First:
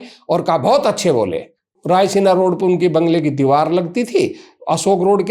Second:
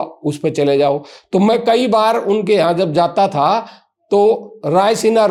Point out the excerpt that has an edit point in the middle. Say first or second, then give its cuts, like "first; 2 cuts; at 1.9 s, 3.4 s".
first; 1 cut; at 1.7 s